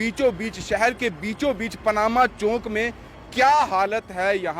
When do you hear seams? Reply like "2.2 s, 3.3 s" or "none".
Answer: none